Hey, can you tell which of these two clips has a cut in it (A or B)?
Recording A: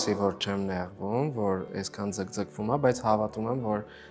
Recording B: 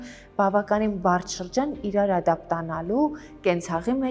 A